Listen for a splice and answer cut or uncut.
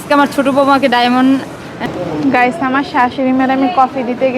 cut